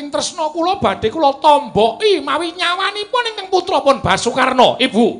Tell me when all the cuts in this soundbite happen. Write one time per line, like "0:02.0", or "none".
none